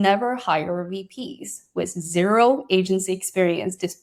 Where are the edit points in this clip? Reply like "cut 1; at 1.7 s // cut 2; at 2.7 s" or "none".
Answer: none